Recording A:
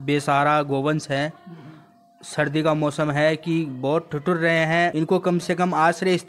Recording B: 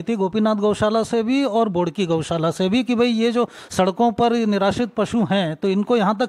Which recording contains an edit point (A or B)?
A